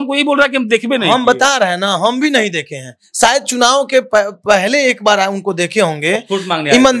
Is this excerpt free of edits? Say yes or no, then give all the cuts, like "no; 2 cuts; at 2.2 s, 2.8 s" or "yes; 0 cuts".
yes; 0 cuts